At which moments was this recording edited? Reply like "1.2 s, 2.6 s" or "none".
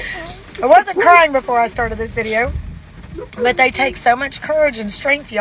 none